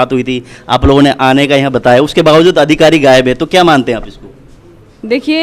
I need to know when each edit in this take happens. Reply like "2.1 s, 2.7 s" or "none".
none